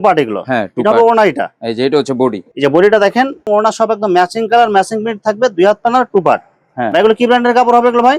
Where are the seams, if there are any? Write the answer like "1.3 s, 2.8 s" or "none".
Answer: none